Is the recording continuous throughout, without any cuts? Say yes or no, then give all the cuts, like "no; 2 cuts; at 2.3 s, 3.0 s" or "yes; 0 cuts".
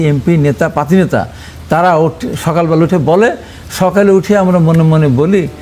yes; 0 cuts